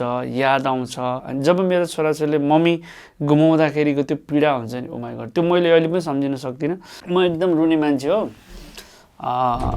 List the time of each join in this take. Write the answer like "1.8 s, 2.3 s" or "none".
1.3 s, 6.9 s